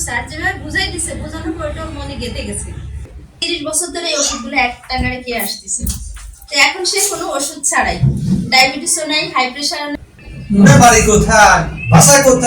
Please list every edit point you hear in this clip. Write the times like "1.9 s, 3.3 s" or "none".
3.3 s, 10.0 s